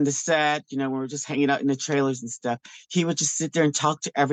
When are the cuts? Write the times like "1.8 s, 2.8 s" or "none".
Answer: none